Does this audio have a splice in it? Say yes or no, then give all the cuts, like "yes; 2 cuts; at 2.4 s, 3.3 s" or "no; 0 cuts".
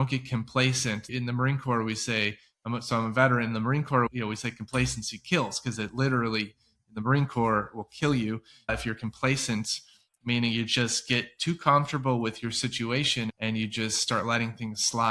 yes; 2 cuts; at 1.1 s, 4.1 s